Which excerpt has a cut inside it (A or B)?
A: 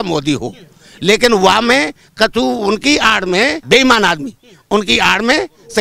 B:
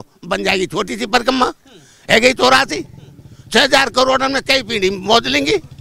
A